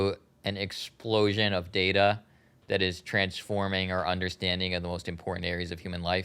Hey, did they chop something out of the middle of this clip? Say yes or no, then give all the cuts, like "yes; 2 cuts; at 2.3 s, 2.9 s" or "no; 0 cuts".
no; 0 cuts